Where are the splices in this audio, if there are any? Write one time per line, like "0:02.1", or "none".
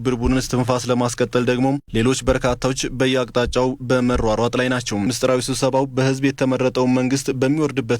0:05.0